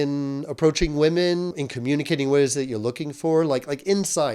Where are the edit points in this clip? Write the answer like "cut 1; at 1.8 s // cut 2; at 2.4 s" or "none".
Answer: cut 1; at 1.6 s

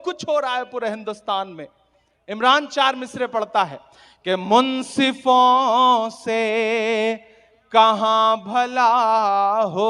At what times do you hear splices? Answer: none

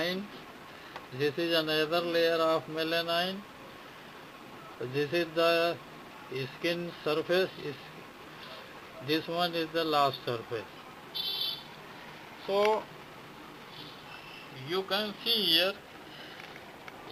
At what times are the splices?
none

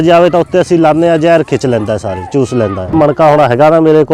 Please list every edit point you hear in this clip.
cut 1; at 2.9 s

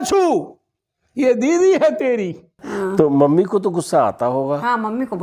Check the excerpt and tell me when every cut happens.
cut 1; at 2.6 s

